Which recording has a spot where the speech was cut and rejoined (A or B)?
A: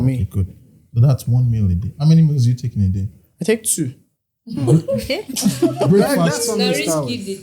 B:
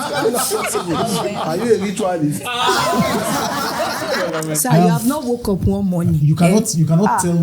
B